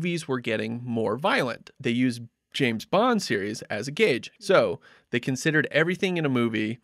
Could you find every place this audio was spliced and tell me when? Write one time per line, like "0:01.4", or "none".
0:01.7
0:04.3